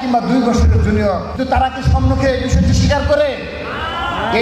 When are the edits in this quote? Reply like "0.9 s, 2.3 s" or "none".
1.3 s